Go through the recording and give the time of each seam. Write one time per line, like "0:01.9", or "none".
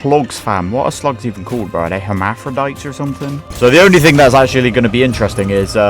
0:03.4